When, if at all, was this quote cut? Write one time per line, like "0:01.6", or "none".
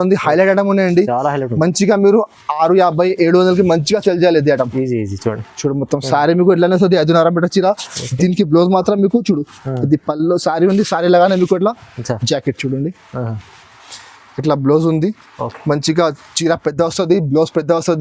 none